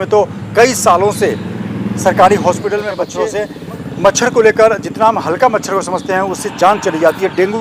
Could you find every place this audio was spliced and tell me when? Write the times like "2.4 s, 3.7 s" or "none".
3.1 s